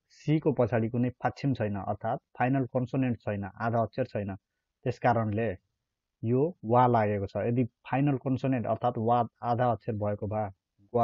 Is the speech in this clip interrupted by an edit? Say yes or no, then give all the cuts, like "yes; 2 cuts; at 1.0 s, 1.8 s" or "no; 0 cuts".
no; 0 cuts